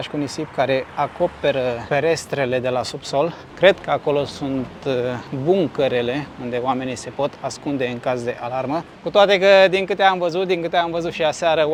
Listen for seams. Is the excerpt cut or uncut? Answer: uncut